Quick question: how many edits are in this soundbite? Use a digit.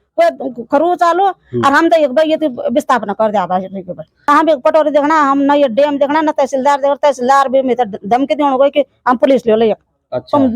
1